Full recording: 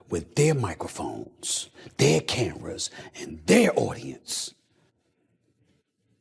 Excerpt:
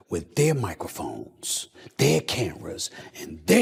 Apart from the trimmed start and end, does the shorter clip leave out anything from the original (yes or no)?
no